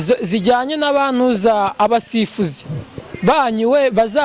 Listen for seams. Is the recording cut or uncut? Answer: uncut